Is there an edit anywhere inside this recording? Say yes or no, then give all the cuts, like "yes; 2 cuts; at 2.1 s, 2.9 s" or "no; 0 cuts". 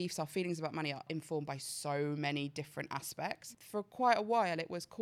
yes; 2 cuts; at 1.1 s, 3.4 s